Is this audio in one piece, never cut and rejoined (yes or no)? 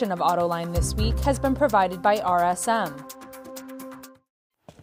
no